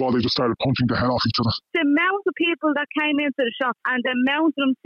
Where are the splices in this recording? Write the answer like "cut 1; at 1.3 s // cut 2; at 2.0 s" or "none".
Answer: cut 1; at 1.7 s